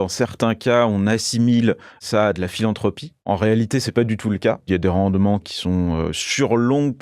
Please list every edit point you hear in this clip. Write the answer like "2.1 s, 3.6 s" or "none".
2.0 s, 3.3 s, 4.7 s, 5.5 s